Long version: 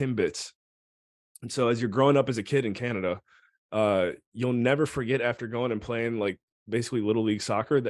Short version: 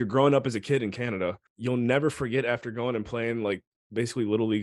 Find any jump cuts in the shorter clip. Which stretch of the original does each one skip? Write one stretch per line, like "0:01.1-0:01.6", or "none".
0:03.3-0:04.3